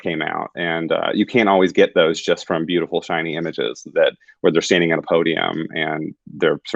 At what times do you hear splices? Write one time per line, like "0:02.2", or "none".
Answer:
none